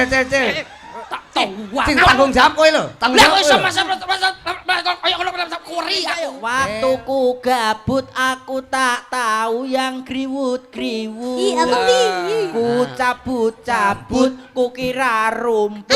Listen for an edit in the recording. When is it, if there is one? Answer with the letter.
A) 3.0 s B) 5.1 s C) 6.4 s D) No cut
C